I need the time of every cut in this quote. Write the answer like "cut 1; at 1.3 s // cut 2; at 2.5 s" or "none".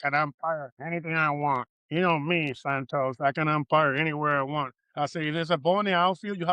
cut 1; at 1.8 s

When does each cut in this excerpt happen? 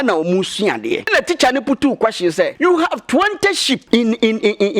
cut 1; at 1.1 s // cut 2; at 2.5 s // cut 3; at 3.8 s

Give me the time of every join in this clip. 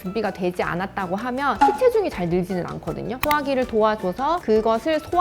cut 1; at 1.6 s // cut 2; at 3.1 s // cut 3; at 4.4 s

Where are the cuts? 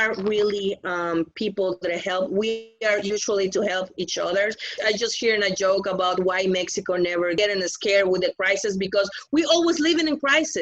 cut 1; at 4.8 s // cut 2; at 7.4 s

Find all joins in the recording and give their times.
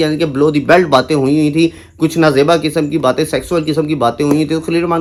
none

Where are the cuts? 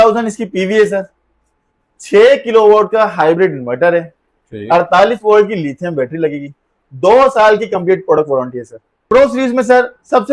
cut 1; at 9.0 s

